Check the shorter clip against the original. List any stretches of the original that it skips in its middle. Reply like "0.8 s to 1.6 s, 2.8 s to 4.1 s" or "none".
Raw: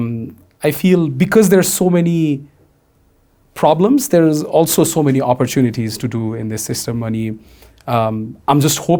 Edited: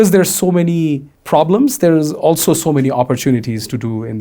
2.5 s to 3.4 s